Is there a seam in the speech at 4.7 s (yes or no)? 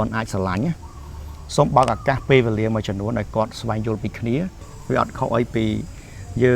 yes